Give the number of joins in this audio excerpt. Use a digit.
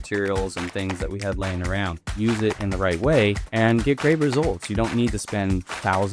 2